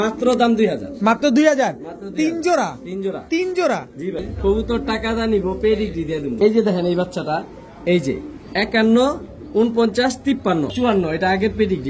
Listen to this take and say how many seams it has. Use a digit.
3